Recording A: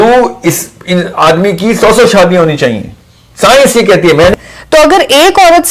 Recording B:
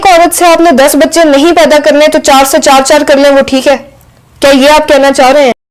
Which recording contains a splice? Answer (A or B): A